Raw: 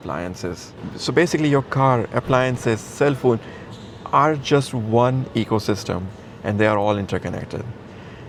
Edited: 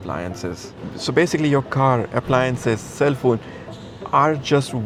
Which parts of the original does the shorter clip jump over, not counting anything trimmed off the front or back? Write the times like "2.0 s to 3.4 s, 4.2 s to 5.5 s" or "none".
none